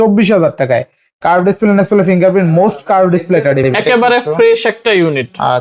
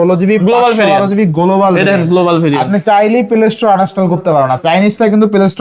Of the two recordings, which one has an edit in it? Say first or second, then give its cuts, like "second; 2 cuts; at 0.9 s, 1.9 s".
first; 1 cut; at 3.6 s